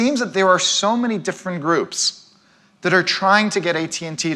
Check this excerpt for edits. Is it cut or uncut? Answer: uncut